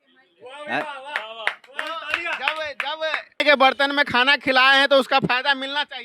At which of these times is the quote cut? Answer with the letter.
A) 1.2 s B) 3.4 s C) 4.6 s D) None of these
B